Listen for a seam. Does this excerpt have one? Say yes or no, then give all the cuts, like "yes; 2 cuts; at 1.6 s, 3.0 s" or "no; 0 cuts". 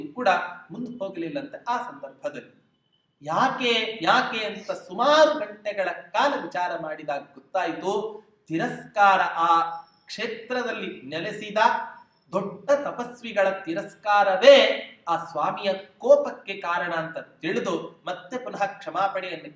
no; 0 cuts